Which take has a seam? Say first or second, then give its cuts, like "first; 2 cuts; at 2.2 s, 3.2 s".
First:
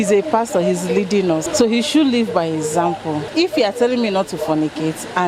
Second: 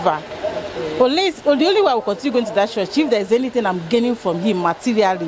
first; 2 cuts; at 1.5 s, 3.3 s